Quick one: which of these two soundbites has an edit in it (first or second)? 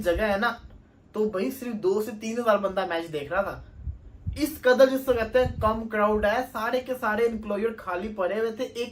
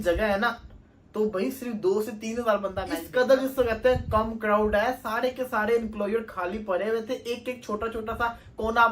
second